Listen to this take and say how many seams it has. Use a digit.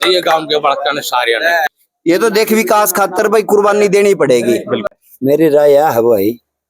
2